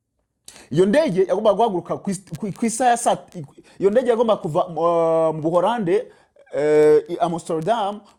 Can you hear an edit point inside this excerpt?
no; 0 cuts

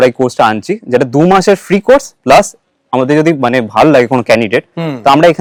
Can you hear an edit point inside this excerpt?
no; 0 cuts

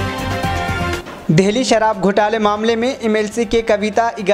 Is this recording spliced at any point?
no; 0 cuts

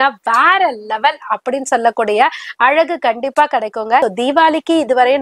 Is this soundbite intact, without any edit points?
no; 1 cut; at 4.0 s

